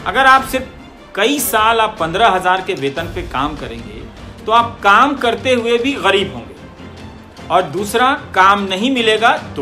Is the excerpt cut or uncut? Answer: uncut